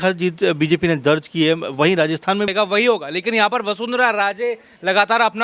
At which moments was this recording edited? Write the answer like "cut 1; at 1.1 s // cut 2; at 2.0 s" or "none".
cut 1; at 2.5 s